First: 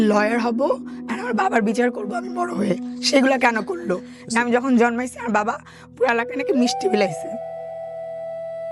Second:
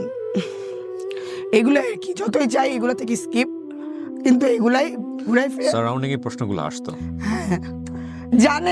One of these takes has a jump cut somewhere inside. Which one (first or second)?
first